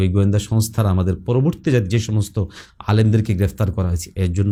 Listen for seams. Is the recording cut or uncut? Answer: uncut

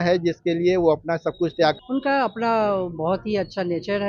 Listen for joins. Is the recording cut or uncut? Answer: cut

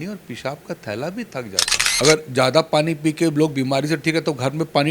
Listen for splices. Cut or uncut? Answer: cut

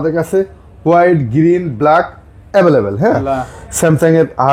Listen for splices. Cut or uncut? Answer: cut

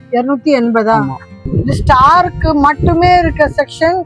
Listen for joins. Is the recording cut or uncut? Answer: cut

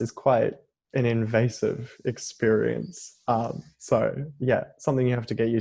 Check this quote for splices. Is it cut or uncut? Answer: uncut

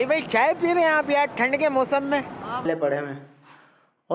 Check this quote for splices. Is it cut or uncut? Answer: cut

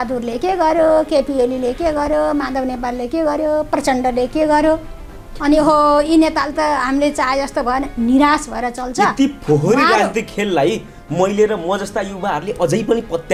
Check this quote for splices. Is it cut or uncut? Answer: uncut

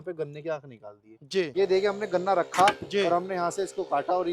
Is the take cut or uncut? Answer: cut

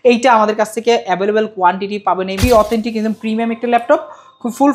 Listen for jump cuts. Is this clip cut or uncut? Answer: cut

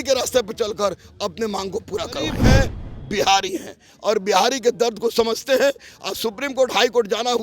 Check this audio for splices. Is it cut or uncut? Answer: cut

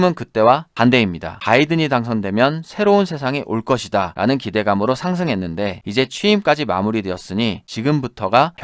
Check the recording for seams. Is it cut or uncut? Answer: uncut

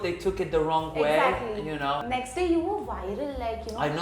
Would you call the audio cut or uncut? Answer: cut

